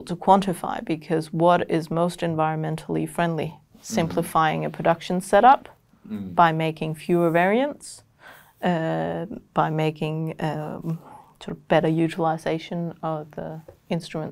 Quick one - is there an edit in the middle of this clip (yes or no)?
no